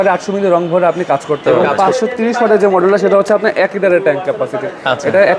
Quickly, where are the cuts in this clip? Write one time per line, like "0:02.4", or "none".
0:01.4